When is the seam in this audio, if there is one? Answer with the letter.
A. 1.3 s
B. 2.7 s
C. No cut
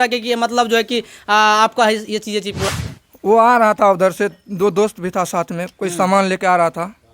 B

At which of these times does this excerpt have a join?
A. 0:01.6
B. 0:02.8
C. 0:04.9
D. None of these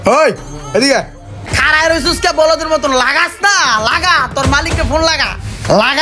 A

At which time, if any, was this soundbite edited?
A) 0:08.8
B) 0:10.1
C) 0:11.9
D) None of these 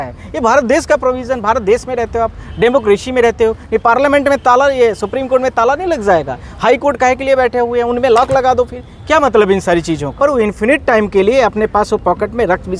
B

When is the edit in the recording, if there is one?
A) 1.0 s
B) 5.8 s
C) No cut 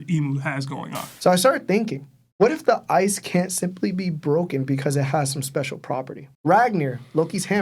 A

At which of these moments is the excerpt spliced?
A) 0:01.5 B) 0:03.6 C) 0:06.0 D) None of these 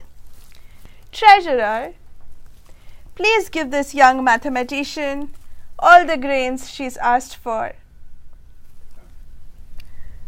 D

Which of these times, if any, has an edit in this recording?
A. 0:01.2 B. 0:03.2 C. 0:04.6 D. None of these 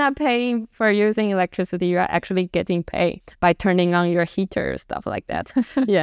B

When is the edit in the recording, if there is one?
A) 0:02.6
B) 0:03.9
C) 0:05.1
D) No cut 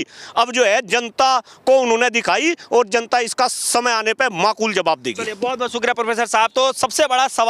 D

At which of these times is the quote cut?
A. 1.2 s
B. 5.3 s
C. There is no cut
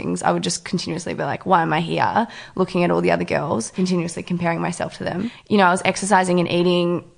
B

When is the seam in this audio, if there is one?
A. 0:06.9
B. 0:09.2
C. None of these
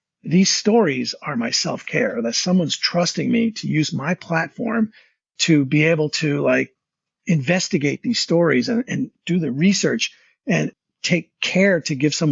B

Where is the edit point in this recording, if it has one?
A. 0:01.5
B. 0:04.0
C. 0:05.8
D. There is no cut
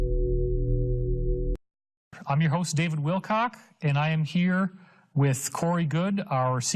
A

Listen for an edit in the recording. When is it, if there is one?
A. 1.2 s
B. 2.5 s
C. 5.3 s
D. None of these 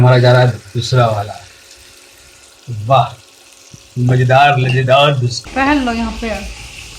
C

